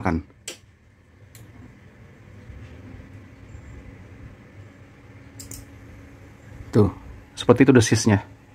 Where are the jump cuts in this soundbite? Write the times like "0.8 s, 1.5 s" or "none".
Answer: none